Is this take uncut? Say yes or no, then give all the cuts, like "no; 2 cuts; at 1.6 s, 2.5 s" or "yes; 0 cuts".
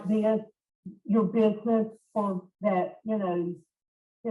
no; 1 cut; at 2.5 s